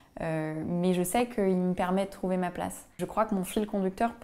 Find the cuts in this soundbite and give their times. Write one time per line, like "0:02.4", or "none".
0:03.0